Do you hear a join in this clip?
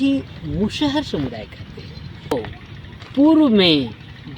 yes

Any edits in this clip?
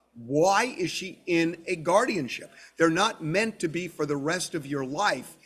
no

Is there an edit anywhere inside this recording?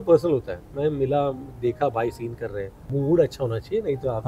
yes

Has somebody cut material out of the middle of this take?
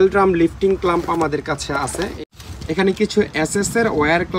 yes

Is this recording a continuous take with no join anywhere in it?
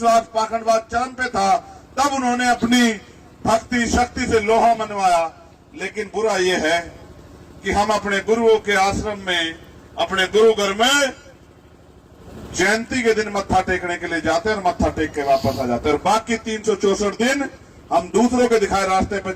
yes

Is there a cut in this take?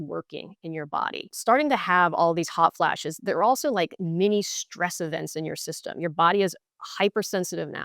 yes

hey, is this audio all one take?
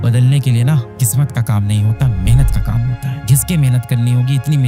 no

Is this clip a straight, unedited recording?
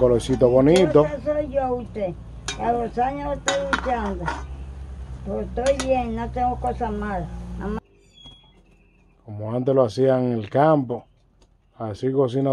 no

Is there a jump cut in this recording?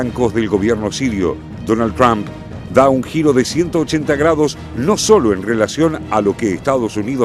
no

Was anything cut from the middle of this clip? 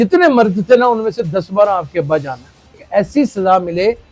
yes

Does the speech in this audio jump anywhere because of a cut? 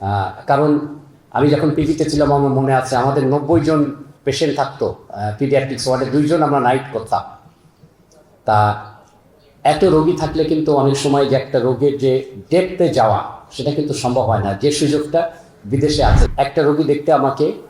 yes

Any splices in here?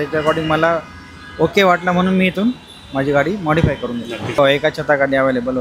yes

